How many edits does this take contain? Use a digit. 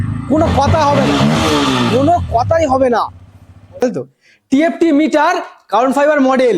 1